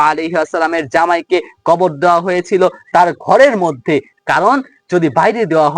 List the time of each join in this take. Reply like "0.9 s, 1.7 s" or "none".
none